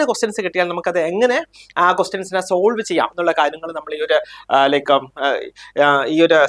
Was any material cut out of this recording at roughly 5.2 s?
no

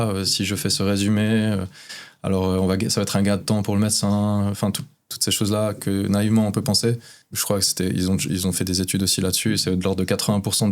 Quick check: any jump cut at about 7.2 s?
yes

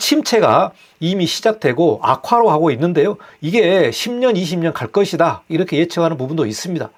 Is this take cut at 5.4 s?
no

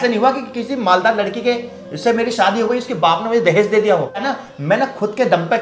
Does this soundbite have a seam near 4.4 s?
yes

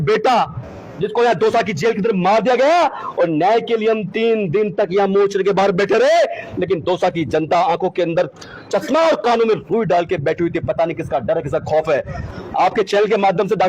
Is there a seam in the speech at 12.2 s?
yes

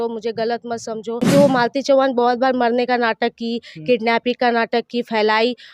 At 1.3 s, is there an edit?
yes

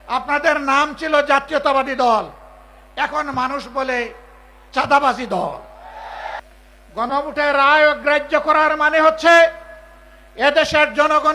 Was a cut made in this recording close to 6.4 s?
yes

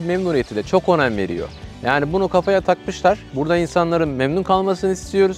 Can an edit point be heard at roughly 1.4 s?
no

